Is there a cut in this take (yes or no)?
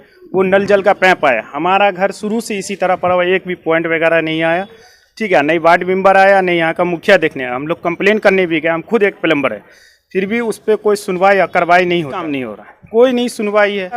yes